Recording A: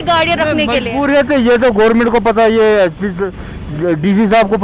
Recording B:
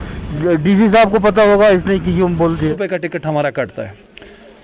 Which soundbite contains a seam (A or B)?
B